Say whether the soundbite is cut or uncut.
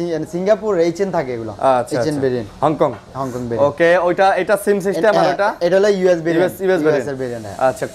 uncut